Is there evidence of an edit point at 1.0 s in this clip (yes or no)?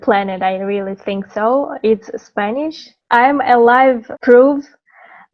no